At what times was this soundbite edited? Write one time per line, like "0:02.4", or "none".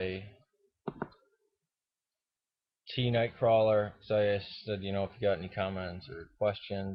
0:03.2